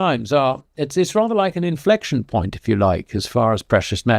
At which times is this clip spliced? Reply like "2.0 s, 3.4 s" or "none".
none